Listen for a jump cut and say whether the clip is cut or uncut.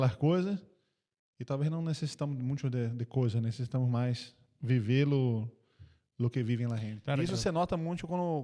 cut